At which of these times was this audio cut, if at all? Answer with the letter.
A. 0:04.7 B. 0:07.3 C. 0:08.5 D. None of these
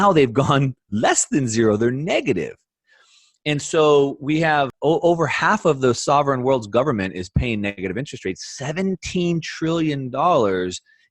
A